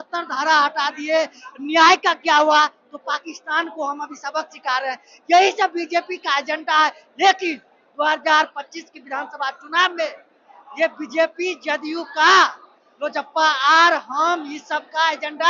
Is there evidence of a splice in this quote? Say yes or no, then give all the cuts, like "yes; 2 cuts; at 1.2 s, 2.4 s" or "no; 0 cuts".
no; 0 cuts